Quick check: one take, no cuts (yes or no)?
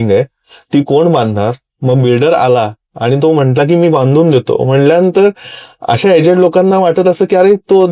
yes